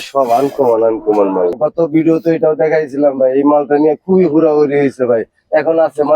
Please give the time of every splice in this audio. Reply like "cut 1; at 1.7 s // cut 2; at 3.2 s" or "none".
cut 1; at 1.6 s